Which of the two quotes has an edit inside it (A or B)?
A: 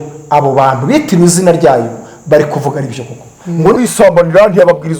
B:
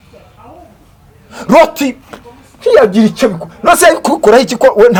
A